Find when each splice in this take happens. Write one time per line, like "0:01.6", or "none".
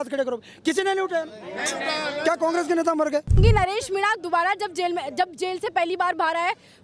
0:03.4